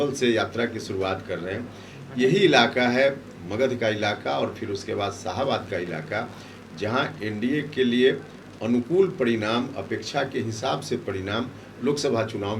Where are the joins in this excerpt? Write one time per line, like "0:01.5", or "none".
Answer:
none